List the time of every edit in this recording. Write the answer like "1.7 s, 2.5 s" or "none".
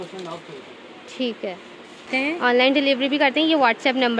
2.1 s